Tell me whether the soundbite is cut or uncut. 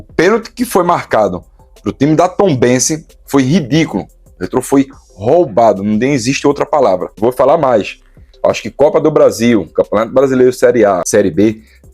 cut